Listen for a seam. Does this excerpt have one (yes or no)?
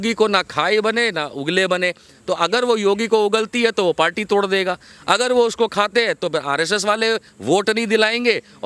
no